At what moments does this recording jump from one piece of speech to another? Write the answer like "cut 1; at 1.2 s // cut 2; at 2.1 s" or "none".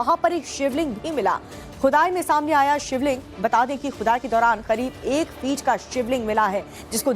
cut 1; at 5.0 s